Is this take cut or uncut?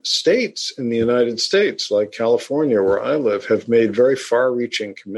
uncut